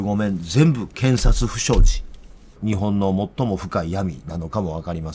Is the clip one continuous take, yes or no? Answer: no